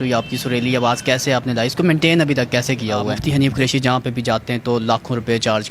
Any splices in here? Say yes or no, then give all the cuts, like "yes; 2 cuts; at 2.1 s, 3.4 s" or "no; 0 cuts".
yes; 1 cut; at 3.2 s